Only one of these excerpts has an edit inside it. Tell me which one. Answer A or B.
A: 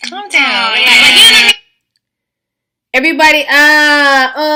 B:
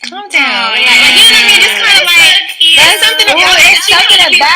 B